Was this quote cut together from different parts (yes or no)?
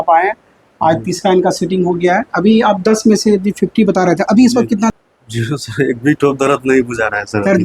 yes